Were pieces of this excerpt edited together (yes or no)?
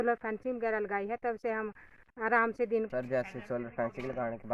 yes